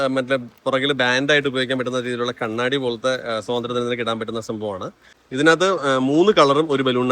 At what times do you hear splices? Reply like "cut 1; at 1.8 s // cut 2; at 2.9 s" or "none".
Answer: cut 1; at 5.1 s